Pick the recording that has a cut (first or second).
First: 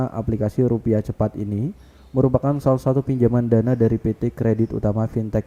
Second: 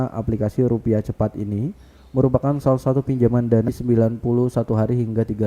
second